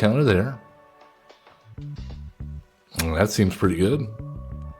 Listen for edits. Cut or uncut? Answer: cut